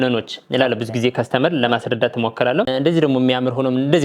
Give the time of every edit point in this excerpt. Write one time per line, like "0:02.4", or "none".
0:02.7